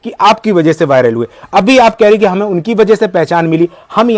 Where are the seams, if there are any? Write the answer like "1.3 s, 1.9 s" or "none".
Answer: none